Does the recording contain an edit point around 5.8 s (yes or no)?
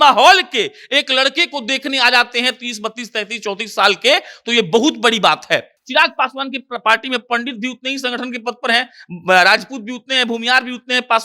yes